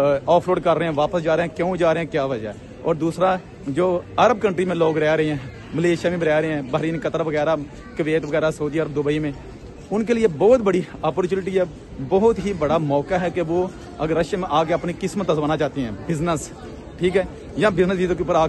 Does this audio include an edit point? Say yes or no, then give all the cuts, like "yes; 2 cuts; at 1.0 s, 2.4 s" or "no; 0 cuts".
no; 0 cuts